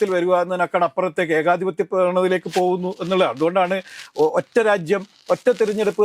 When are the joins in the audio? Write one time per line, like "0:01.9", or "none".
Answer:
none